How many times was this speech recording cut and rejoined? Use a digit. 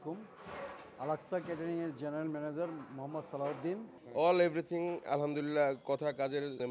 1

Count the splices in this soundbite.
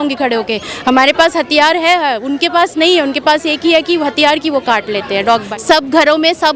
1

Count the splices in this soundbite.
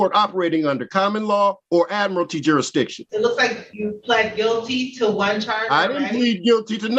3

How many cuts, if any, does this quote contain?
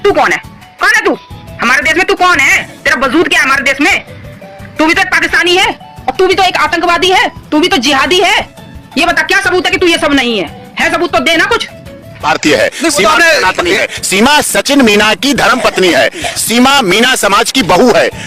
0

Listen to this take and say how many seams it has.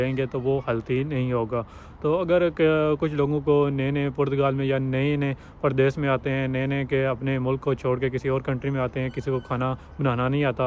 0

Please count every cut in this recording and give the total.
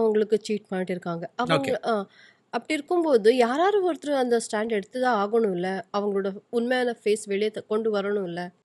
0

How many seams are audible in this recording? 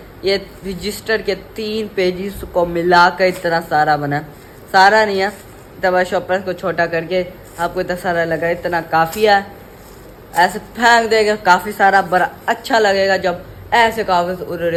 0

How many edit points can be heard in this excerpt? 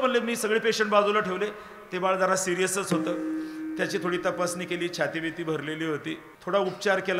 1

